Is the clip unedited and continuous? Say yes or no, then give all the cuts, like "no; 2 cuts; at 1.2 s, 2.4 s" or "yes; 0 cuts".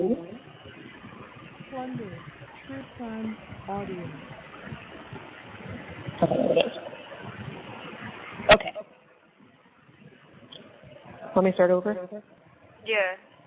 yes; 0 cuts